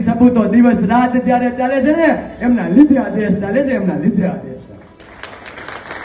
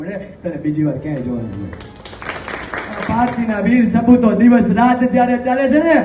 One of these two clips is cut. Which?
second; 1 cut; at 2.9 s

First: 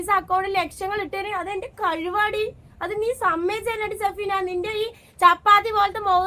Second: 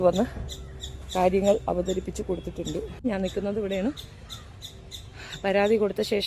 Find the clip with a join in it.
second; 1 cut; at 3.0 s

